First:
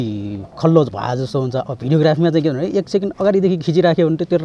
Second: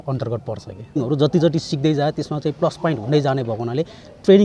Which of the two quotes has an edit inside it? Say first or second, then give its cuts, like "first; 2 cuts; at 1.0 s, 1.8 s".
second; 1 cut; at 1.0 s